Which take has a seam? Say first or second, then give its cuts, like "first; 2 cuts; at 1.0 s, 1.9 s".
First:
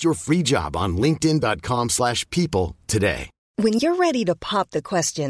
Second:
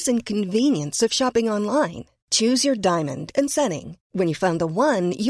first; 1 cut; at 3.3 s